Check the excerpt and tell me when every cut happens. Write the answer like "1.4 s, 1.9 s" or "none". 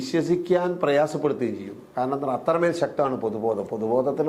none